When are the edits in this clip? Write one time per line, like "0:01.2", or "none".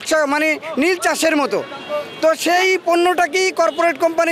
none